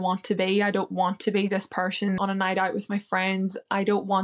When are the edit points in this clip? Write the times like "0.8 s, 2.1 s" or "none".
2.2 s